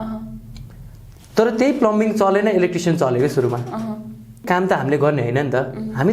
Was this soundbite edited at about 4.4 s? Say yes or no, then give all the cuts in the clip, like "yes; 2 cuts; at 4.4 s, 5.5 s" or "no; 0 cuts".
yes; 1 cut; at 4.4 s